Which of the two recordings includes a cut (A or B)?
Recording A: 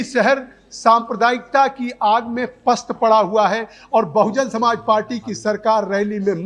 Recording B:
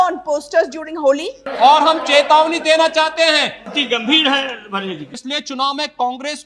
B